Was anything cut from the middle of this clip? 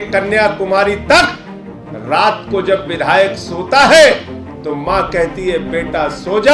no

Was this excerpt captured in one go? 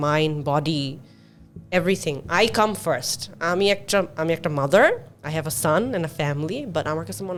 yes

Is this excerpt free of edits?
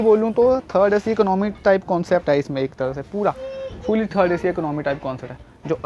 yes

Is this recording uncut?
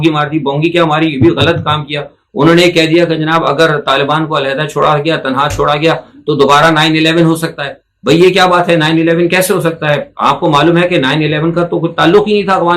yes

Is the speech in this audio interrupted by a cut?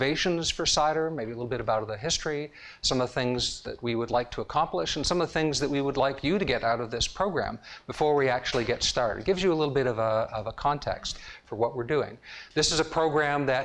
no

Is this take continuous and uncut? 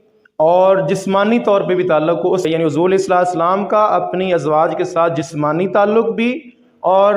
no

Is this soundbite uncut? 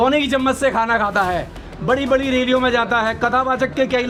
yes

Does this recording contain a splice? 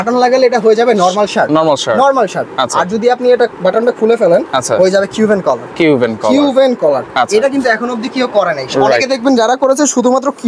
no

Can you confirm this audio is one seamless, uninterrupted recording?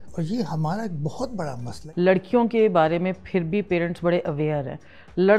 no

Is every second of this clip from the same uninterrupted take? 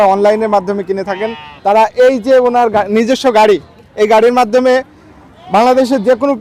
yes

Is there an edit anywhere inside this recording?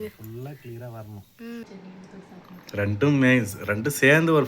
yes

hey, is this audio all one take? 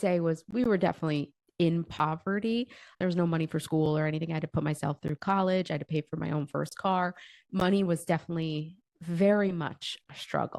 no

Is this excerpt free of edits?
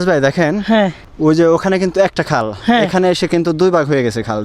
no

